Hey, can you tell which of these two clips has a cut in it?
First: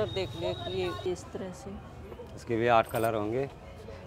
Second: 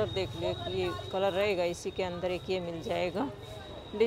first; 1 cut; at 1.0 s

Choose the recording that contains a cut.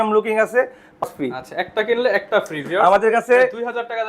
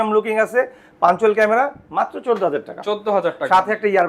first; 1 cut; at 1.0 s

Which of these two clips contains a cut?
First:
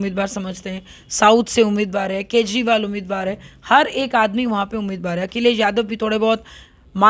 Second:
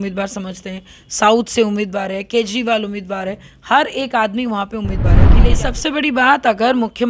second; 1 cut; at 5.3 s

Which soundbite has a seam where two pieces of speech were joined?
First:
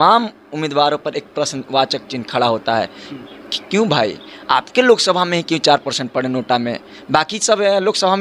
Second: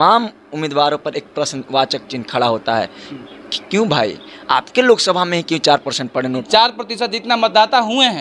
second; 1 cut; at 6.4 s

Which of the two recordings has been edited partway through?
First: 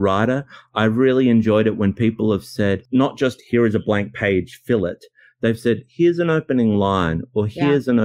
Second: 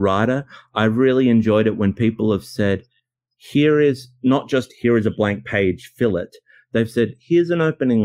first; 1 cut; at 2.8 s

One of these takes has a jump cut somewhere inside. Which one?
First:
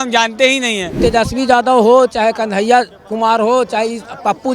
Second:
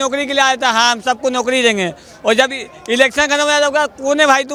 first; 1 cut; at 1.0 s

